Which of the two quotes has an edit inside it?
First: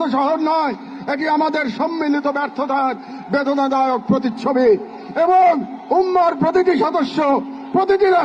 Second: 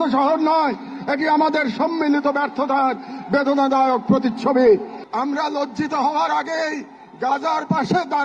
second; 1 cut; at 5.0 s

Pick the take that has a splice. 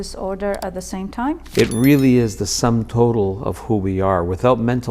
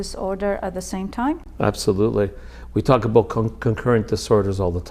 first; 1 cut; at 1.4 s

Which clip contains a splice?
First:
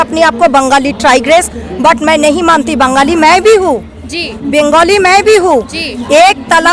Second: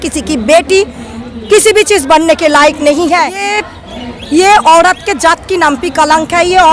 second; 1 cut; at 3.5 s

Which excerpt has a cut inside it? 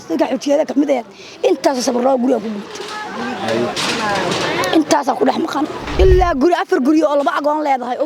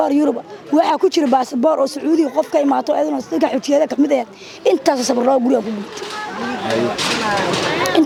first; 1 cut; at 6.0 s

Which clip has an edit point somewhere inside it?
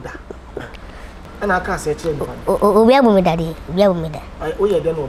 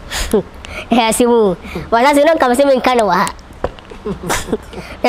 first; 1 cut; at 1.2 s

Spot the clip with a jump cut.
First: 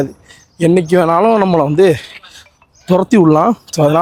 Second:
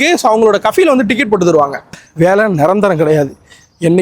second; 1 cut; at 2.0 s

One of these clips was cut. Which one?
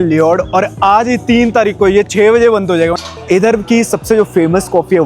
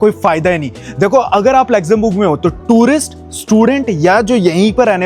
first; 1 cut; at 3.0 s

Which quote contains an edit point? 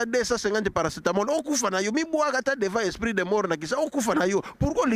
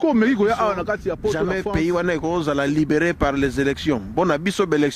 second; 1 cut; at 1.4 s

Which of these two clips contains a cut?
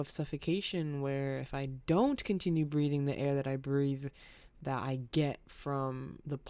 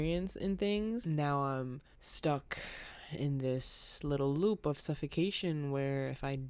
second; 1 cut; at 1.0 s

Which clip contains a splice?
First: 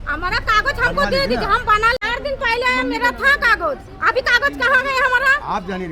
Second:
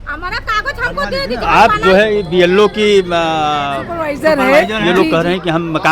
second; 2 cuts; at 1.4 s, 4.9 s

